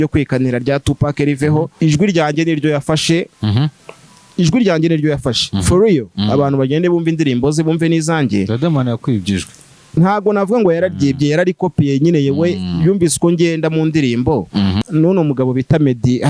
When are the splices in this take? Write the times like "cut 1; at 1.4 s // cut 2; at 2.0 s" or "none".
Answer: cut 1; at 1.7 s // cut 2; at 14.8 s